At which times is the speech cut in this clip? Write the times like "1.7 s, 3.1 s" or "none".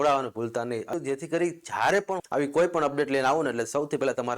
0.9 s, 2.1 s